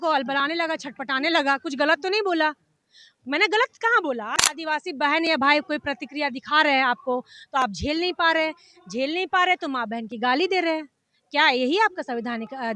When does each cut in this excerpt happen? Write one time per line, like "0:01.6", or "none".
0:04.3